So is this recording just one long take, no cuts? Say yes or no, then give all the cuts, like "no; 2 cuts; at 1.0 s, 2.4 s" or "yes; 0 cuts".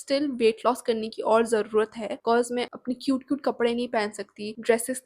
yes; 0 cuts